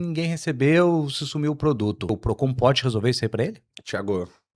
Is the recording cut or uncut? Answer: cut